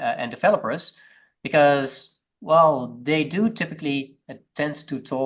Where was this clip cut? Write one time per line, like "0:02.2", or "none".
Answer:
none